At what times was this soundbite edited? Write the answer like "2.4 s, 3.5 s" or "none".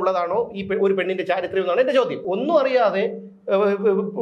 2.2 s